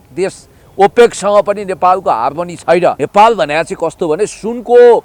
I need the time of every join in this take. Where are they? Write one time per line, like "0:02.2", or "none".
0:03.0